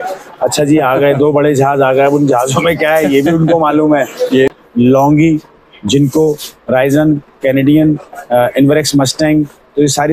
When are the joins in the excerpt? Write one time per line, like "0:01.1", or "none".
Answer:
0:04.5